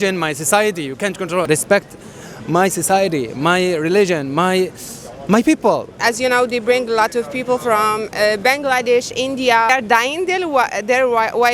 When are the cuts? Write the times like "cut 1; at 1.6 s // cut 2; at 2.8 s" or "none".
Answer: cut 1; at 1.5 s // cut 2; at 5.9 s